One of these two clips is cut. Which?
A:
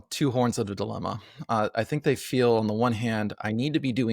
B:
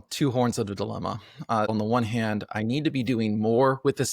B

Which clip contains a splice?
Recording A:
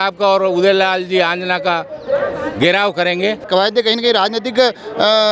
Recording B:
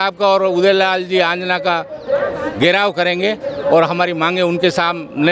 A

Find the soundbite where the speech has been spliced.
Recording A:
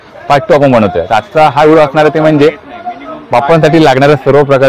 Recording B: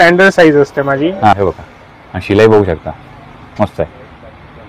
B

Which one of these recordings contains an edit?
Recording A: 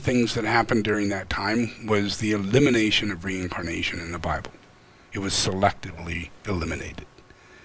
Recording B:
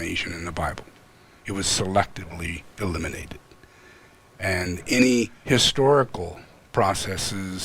B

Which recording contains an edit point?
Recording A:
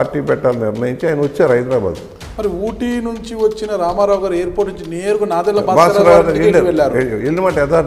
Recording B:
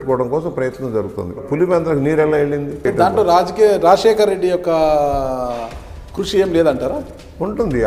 B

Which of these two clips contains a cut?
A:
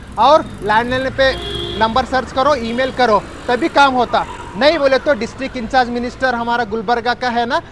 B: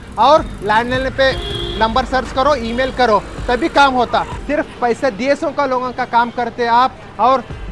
B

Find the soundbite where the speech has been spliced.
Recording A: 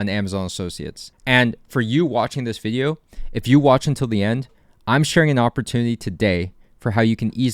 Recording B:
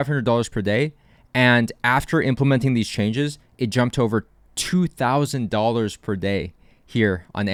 A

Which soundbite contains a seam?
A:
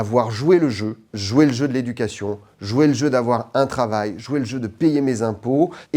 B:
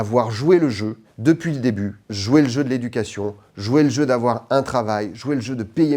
A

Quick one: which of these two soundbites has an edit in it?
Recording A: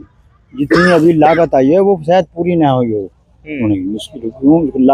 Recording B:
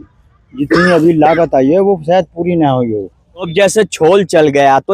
B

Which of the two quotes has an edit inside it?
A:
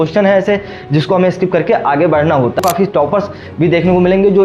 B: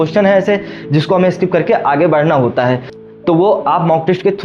A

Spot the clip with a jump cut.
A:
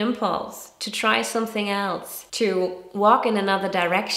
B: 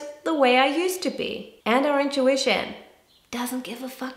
B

